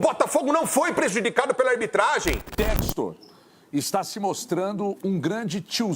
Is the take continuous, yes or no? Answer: no